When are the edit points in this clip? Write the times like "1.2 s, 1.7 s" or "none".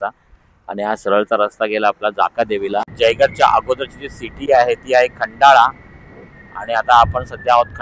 2.9 s

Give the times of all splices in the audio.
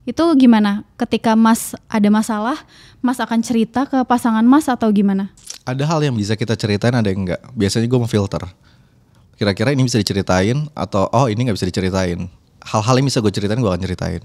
none

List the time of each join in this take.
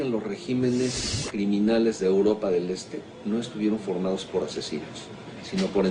1.8 s

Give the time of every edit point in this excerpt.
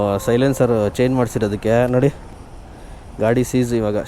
none

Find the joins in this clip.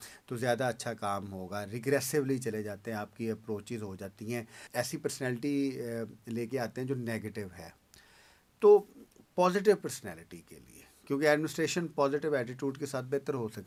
none

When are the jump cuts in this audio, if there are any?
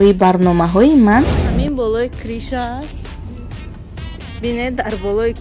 1.5 s

